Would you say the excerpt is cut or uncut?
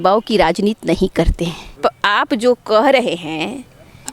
cut